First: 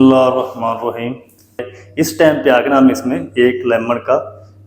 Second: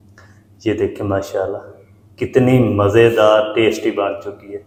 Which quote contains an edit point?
first; 1 cut; at 1.8 s

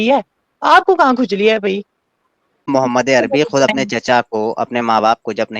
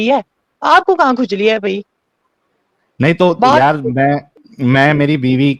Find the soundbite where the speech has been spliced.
first; 1 cut; at 2.7 s

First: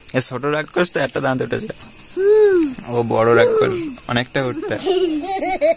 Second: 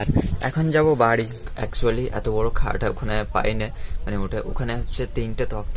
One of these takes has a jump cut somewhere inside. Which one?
second; 1 cut; at 1.5 s

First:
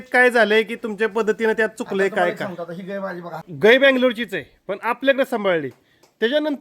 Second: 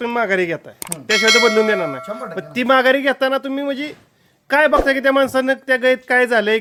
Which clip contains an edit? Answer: first; 1 cut; at 3.5 s

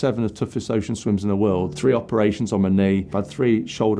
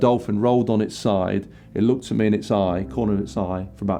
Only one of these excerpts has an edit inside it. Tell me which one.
first; 2 cuts; at 1.7 s, 3.1 s

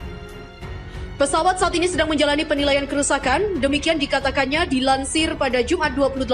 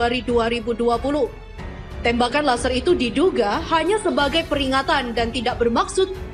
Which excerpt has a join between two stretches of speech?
first; 1 cut; at 1.2 s

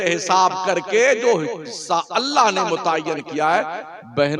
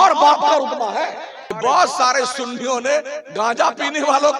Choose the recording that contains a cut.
second; 1 cut; at 1.6 s

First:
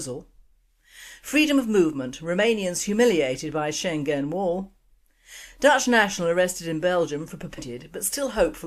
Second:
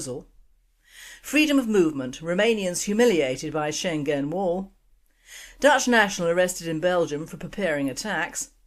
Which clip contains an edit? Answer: second; 1 cut; at 7.4 s

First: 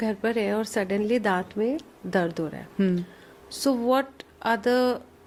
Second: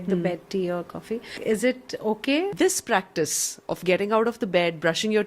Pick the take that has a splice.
second; 2 cuts; at 1.3 s, 2.5 s

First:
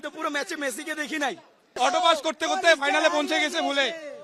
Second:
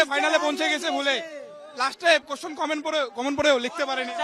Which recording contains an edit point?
first; 1 cut; at 1.8 s

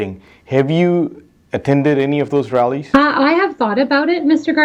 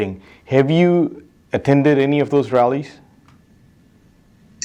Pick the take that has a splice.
first; 1 cut; at 2.8 s

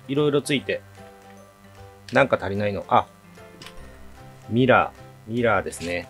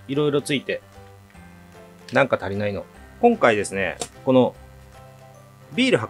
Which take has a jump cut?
second; 1 cut; at 2.8 s

